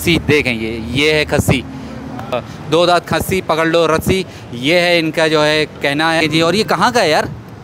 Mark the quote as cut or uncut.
cut